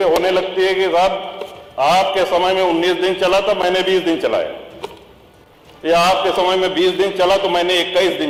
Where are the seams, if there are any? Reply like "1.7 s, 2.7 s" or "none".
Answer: none

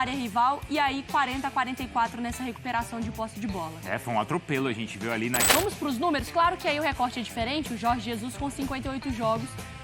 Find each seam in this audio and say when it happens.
5.4 s

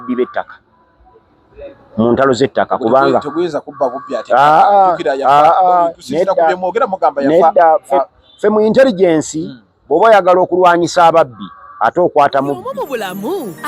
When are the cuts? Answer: 12.7 s

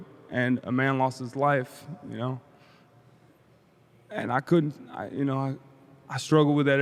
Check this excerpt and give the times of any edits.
none

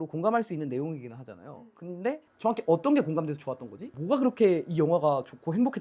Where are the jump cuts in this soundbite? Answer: 2.3 s, 3.9 s

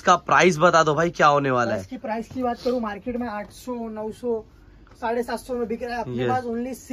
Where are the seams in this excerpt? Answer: none

